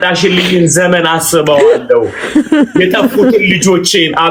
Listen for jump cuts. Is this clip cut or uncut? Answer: uncut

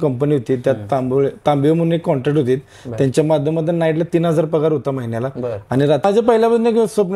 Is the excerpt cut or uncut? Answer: cut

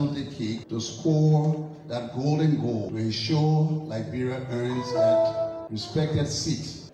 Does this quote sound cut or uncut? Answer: uncut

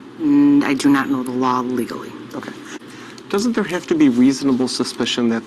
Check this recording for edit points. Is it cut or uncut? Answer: cut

